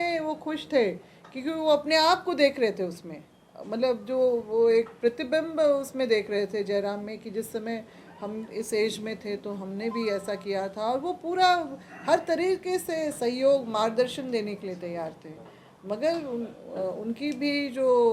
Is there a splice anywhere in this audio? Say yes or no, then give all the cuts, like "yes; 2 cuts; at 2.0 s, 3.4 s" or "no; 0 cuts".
no; 0 cuts